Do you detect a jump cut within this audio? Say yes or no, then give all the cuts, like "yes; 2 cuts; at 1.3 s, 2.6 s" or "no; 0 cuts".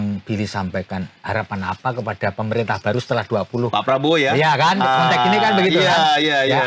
no; 0 cuts